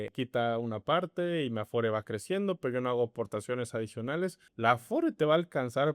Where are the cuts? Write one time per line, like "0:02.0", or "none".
0:04.4